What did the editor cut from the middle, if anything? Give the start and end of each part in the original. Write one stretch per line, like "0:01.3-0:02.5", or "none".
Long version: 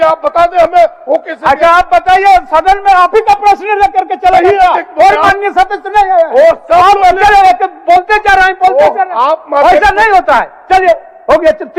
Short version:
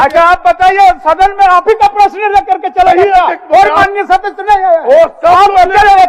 none